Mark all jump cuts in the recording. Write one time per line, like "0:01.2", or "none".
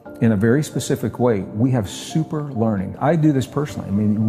0:03.0